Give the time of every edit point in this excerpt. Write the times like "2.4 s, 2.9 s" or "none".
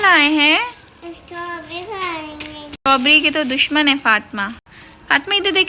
none